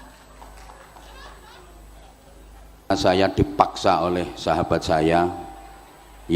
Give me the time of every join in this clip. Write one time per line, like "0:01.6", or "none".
0:02.9